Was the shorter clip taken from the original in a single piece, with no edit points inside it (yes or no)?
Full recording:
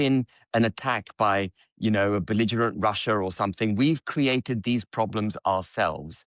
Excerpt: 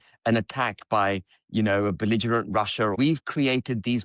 no